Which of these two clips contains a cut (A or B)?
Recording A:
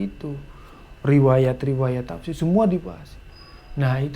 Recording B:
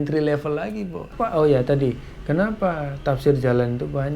B